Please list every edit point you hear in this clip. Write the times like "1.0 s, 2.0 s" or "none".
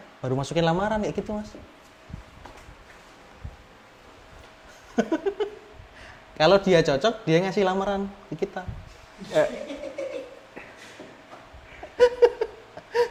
none